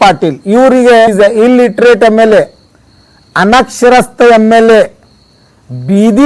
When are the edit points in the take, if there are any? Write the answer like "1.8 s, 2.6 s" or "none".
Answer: 1.1 s